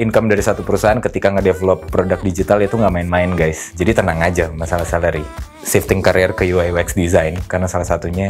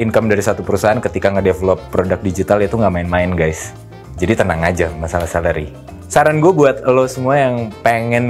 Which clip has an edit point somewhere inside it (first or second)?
first